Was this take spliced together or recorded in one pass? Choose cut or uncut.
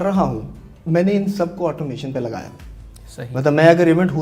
uncut